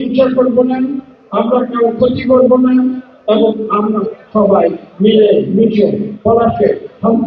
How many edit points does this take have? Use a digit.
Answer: 0